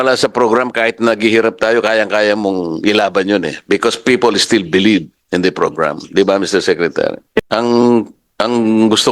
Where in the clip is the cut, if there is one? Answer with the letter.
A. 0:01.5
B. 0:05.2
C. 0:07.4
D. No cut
C